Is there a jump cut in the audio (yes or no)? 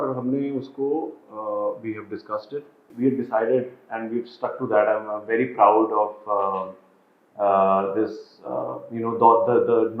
yes